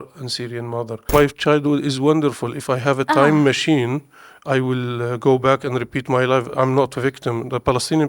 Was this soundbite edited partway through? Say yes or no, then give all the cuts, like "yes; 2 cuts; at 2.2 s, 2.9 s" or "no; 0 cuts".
yes; 1 cut; at 1.1 s